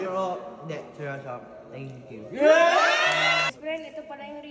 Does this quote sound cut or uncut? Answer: cut